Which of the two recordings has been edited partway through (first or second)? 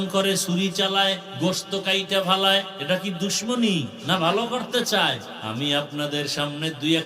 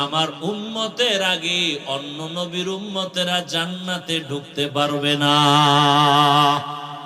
first